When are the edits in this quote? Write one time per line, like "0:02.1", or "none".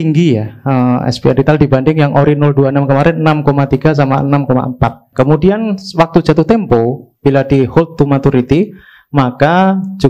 0:05.1